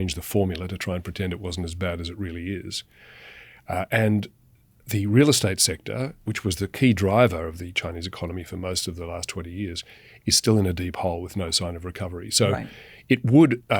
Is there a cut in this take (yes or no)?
no